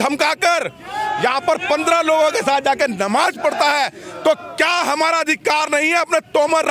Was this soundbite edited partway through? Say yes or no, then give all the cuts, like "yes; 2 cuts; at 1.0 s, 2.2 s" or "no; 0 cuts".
no; 0 cuts